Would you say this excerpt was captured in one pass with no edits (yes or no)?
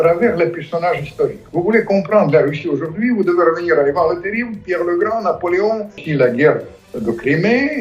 no